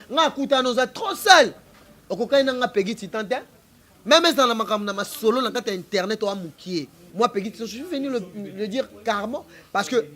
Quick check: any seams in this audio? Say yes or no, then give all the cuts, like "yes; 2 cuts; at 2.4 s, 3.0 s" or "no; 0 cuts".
yes; 1 cut; at 7.0 s